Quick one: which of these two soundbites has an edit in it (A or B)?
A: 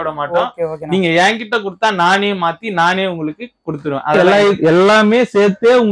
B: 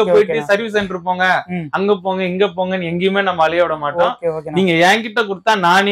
A